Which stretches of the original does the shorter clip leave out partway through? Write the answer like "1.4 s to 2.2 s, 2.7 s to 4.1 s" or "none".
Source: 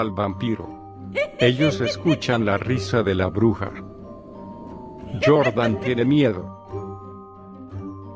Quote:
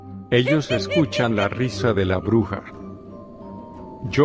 none